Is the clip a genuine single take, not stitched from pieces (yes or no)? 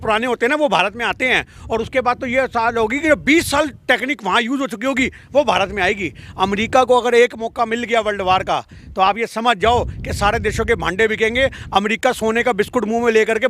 yes